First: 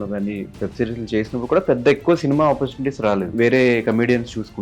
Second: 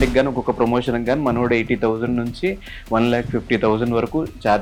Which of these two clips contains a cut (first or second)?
first